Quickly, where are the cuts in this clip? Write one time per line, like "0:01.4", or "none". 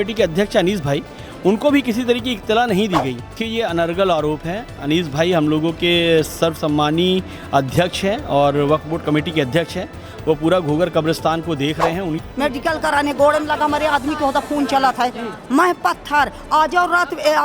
0:03.4
0:12.2